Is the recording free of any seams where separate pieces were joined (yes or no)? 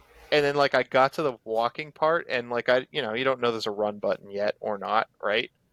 yes